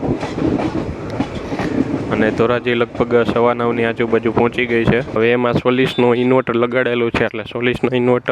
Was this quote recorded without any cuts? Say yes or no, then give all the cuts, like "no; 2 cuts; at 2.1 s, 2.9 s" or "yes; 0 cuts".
no; 1 cut; at 5.1 s